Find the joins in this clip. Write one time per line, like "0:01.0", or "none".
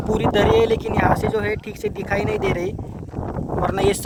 none